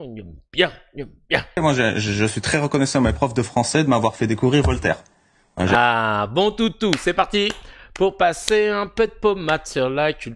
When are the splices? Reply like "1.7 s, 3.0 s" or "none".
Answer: 1.6 s